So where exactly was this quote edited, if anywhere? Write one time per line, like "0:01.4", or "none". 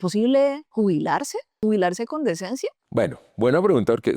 0:01.0